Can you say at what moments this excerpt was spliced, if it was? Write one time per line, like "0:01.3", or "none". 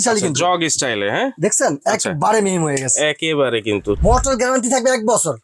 0:04.0